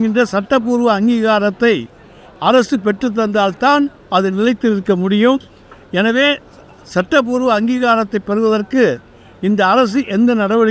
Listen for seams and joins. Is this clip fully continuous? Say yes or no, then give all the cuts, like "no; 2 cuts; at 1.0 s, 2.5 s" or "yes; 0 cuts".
yes; 0 cuts